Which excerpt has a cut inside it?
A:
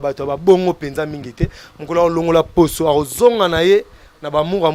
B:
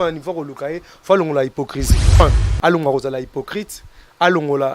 B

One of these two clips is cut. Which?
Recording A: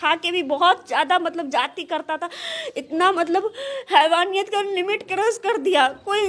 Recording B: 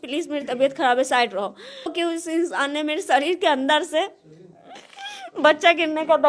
B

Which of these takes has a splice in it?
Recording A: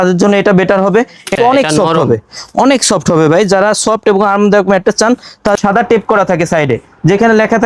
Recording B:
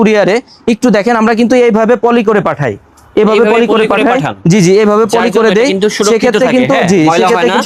A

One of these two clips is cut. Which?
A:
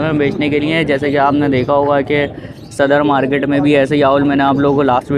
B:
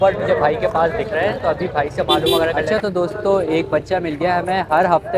B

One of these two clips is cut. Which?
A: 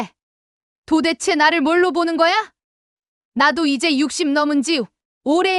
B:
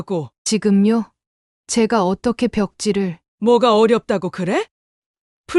B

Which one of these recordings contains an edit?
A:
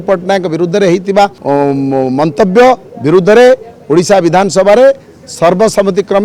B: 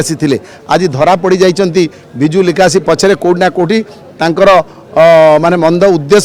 A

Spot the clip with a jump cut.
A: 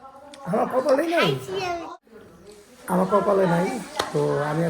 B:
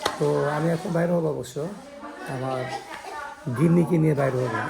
A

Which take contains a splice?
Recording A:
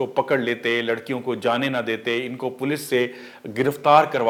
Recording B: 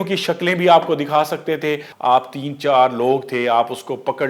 B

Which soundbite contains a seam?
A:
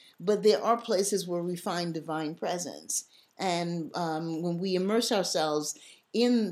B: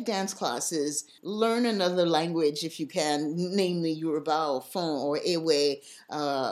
B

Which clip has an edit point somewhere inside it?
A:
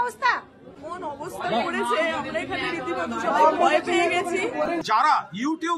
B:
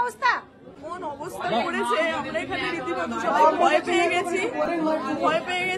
A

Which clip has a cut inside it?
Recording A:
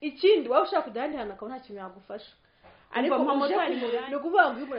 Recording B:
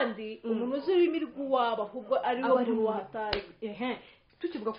A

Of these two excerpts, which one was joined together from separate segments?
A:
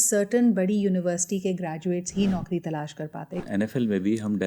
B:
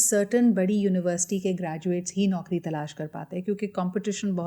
A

